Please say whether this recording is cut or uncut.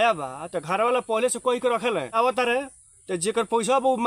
cut